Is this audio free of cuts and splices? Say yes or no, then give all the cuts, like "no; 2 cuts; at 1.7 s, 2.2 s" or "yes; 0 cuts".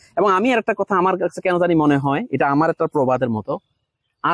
yes; 0 cuts